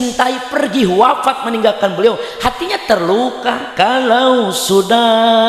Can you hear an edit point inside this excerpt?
no; 0 cuts

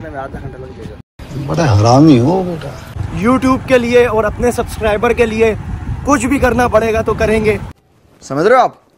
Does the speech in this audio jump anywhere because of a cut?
yes; 1 cut; at 2.7 s

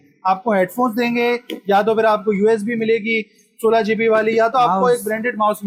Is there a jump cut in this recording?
no; 0 cuts

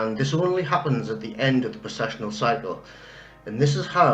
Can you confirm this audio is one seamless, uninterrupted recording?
no; 1 cut; at 1.2 s

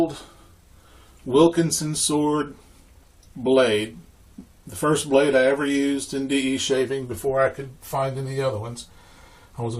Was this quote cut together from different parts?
yes; 1 cut; at 7.0 s

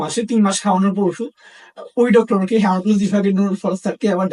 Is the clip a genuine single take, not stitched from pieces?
yes; 0 cuts

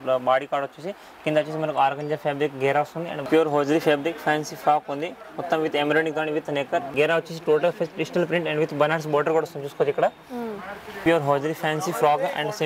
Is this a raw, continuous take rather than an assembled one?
no; 3 cuts; at 3.3 s, 6.9 s, 10.6 s

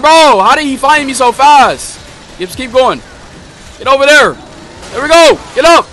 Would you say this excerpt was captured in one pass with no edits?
yes; 0 cuts

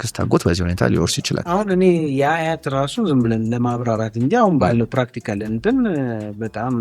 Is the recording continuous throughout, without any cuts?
no; 1 cut; at 1.4 s

